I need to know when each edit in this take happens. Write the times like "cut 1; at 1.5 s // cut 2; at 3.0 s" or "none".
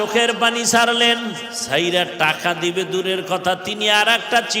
cut 1; at 1.5 s

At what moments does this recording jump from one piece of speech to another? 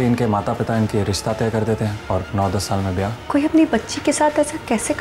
cut 1; at 2.0 s // cut 2; at 3.2 s

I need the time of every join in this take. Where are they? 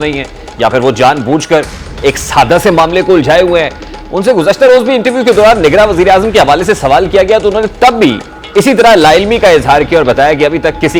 none

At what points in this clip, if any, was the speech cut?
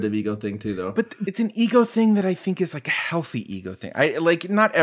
cut 1; at 1.2 s

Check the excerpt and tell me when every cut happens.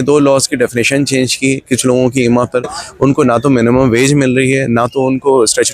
cut 1; at 2.8 s

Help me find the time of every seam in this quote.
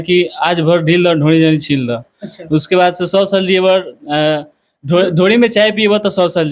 none

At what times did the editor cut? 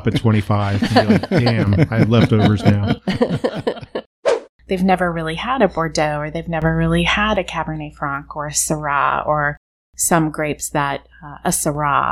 cut 1; at 4.1 s

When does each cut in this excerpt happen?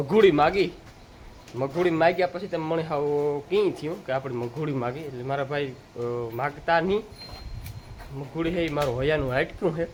none

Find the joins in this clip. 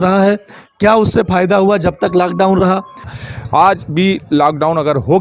cut 1; at 3.1 s

